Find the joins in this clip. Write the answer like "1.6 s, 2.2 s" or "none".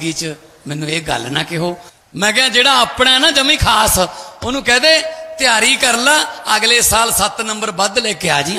1.9 s